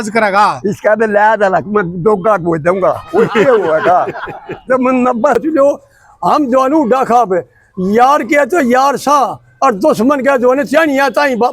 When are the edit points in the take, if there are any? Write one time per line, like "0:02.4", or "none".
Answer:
0:05.4